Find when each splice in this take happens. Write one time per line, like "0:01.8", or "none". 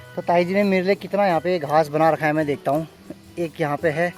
none